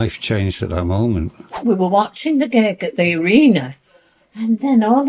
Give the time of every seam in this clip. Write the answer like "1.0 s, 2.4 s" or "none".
1.6 s